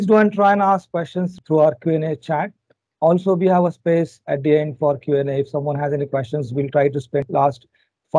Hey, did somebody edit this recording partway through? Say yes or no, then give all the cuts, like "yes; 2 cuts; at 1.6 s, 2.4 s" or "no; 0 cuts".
yes; 2 cuts; at 1.3 s, 7.3 s